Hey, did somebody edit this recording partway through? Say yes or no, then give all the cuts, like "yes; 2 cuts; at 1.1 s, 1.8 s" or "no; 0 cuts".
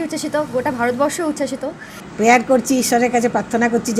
yes; 1 cut; at 2.0 s